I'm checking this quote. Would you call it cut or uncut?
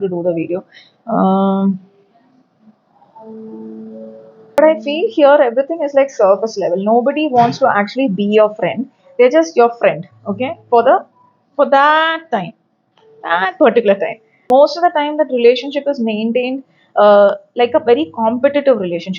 cut